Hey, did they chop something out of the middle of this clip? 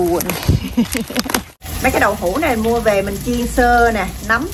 yes; 1 cut; at 1.6 s

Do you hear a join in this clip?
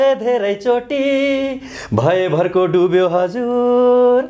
no; 0 cuts

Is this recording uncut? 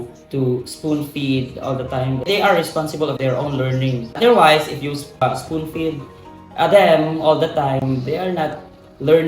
no; 3 cuts; at 2.3 s, 4.2 s, 5.2 s

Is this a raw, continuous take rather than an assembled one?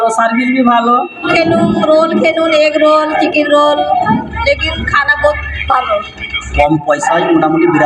no; 2 cuts; at 1.3 s, 6.4 s

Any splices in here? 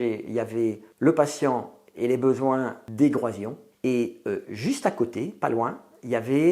yes; 1 cut; at 2.8 s

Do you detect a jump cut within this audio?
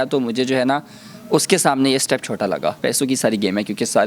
yes; 1 cut; at 2.8 s

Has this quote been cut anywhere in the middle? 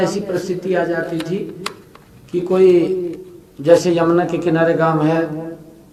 no; 0 cuts

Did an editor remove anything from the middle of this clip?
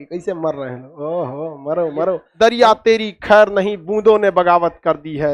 yes; 1 cut; at 2.3 s

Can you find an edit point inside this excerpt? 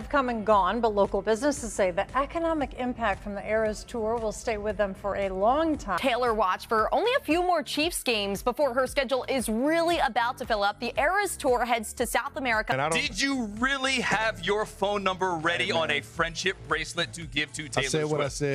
yes; 2 cuts; at 6.0 s, 12.6 s

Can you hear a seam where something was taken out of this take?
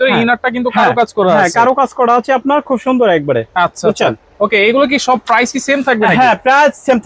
no; 0 cuts

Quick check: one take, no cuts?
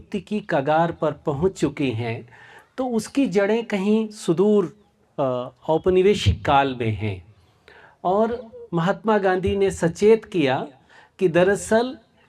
yes; 0 cuts

